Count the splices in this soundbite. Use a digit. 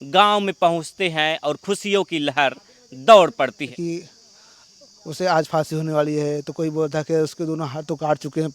1